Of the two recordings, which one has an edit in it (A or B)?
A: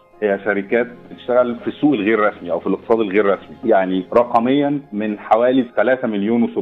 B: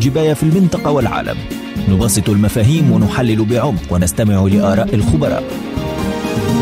A